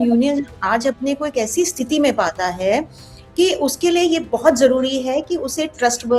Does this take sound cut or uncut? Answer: uncut